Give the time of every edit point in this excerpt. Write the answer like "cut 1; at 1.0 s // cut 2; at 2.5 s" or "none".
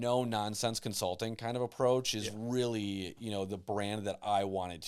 none